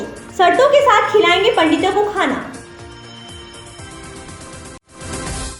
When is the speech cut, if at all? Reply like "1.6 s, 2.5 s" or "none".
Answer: none